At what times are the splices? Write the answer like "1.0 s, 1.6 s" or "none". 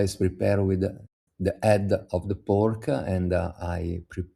none